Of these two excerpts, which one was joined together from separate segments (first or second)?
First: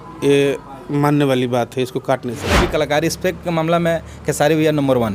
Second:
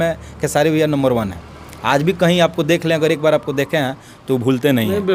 first